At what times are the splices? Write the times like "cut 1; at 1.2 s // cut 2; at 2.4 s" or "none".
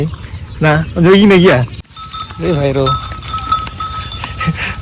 cut 1; at 1.7 s